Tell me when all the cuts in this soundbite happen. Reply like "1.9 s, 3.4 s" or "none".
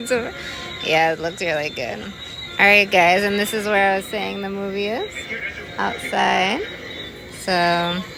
none